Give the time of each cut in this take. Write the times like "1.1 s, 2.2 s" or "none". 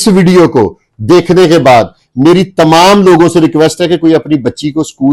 none